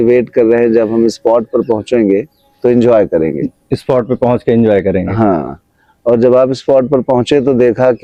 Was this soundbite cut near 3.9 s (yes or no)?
no